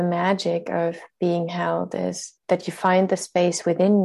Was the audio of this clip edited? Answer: yes; 1 cut; at 2.4 s

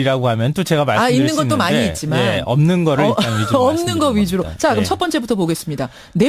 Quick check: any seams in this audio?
yes; 1 cut; at 1.3 s

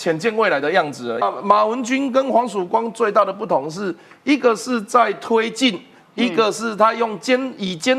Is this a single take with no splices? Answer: no; 1 cut; at 1.2 s

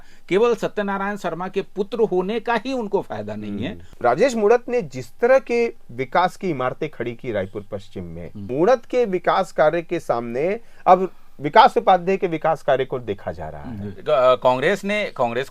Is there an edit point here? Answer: yes; 3 cuts; at 3.9 s, 8.5 s, 13.9 s

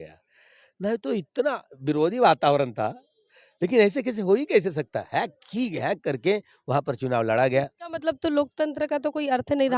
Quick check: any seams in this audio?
no; 0 cuts

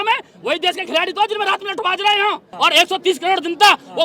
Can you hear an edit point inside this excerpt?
yes; 1 cut; at 2.5 s

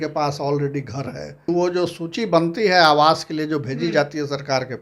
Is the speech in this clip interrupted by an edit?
yes; 1 cut; at 1.5 s

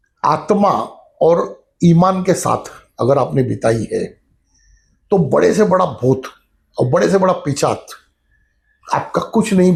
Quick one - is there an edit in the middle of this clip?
no; 0 cuts

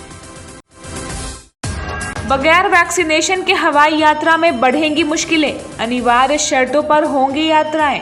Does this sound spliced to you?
no; 0 cuts

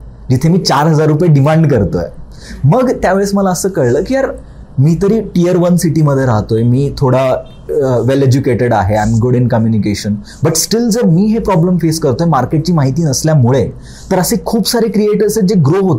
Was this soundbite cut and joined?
no; 0 cuts

